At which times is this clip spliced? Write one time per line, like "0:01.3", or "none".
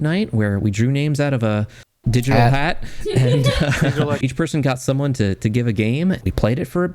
0:04.2
0:06.2